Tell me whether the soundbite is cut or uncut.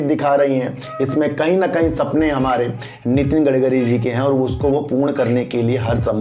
uncut